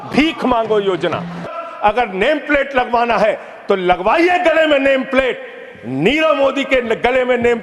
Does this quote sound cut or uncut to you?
cut